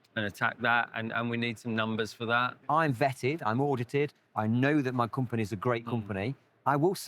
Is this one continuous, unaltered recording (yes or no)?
no